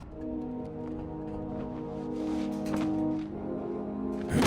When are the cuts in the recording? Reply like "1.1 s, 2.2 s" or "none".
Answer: none